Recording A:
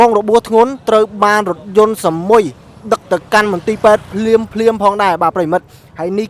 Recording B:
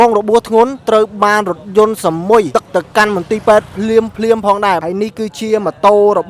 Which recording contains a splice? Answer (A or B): B